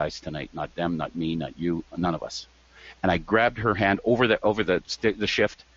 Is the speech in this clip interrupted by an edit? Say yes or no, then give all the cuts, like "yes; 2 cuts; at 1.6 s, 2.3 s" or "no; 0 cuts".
yes; 1 cut; at 4.9 s